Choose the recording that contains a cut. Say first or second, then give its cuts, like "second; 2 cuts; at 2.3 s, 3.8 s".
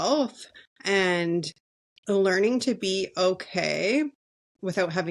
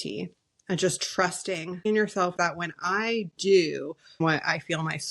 second; 2 cuts; at 2.3 s, 4.2 s